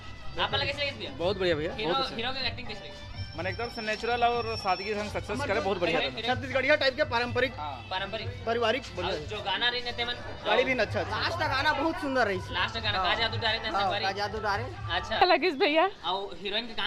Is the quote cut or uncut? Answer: cut